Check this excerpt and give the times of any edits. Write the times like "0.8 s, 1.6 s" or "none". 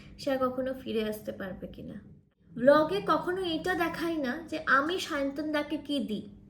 2.4 s

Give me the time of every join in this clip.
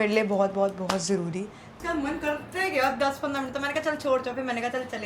1.7 s

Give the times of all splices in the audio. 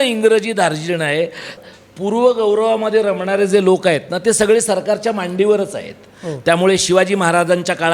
1.6 s

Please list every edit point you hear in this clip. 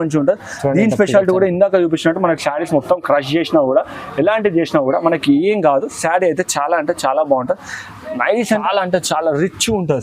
8.6 s

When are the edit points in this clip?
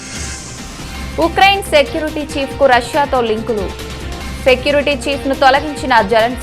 0.9 s

